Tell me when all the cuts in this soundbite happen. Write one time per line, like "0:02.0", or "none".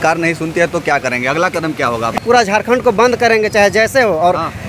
0:02.2